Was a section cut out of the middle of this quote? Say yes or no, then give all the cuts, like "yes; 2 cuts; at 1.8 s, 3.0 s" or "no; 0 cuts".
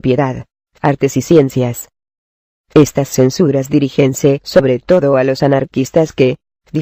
yes; 1 cut; at 3.7 s